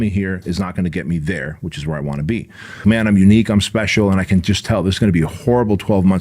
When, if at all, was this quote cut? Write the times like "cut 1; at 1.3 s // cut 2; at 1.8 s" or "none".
cut 1; at 2.8 s

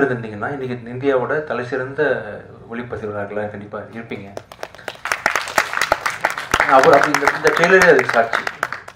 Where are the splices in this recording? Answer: none

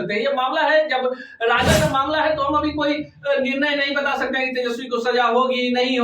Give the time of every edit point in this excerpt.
cut 1; at 1.7 s

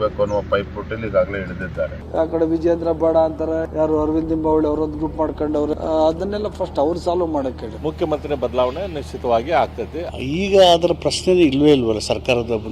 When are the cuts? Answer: cut 1; at 2.0 s // cut 2; at 3.7 s // cut 3; at 5.8 s // cut 4; at 7.7 s // cut 5; at 10.0 s

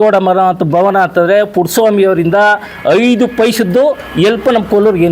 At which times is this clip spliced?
none

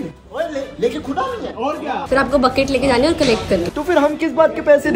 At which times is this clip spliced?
cut 1; at 2.0 s // cut 2; at 3.7 s

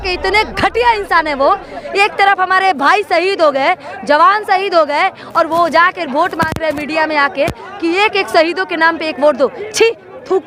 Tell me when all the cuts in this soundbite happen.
none

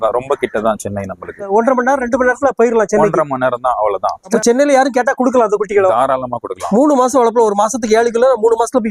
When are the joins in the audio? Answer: none

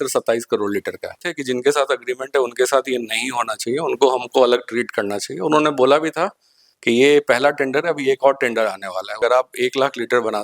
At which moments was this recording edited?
cut 1; at 1.3 s // cut 2; at 9.2 s

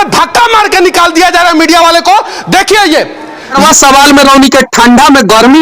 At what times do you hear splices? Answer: cut 1; at 3.6 s

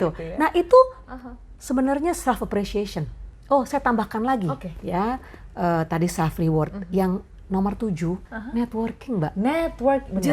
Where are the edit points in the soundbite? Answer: cut 1; at 3.3 s // cut 2; at 8.3 s

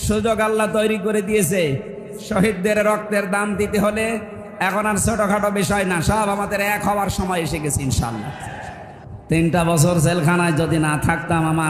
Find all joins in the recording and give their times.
cut 1; at 9.0 s

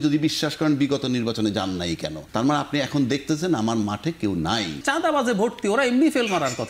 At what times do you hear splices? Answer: cut 1; at 2.2 s // cut 2; at 4.8 s

